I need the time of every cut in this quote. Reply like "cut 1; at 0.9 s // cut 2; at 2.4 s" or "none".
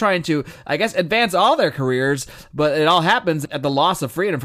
cut 1; at 3.4 s